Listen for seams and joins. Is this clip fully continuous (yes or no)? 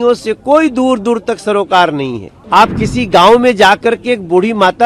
no